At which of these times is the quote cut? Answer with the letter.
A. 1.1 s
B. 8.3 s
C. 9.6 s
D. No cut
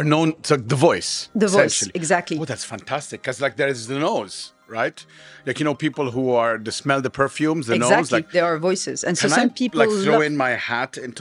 B